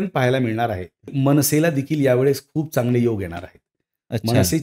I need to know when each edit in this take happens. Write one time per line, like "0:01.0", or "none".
0:01.1